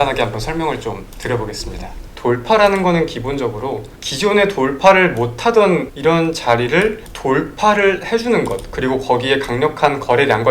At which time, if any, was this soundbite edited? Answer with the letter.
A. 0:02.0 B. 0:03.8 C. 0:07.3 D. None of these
A